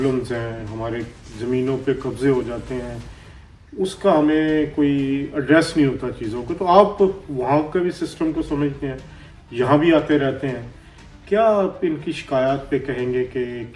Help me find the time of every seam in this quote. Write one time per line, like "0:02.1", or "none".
none